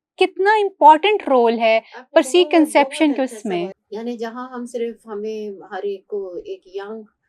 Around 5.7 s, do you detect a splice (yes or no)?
no